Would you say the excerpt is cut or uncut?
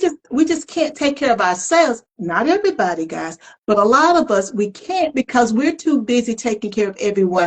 uncut